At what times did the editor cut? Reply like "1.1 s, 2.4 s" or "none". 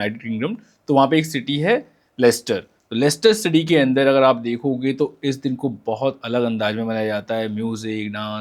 none